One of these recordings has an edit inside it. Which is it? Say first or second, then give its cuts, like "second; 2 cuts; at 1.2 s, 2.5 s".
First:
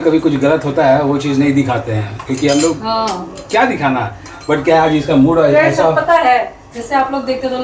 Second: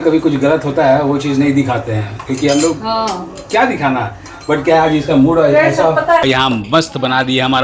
second; 1 cut; at 6.2 s